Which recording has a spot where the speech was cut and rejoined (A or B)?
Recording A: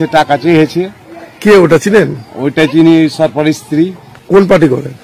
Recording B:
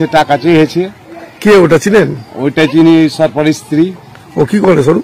A